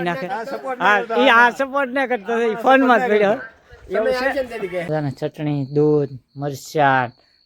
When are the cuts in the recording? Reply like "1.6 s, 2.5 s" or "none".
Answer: 4.9 s